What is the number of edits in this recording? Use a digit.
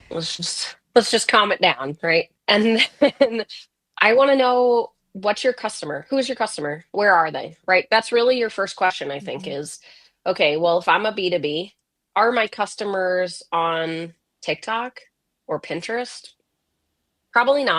1